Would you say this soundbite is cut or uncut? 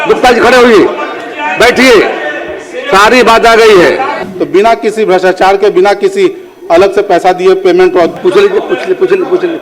cut